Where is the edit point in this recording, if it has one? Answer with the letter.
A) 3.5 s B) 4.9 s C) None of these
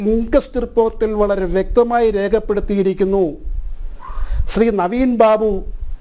C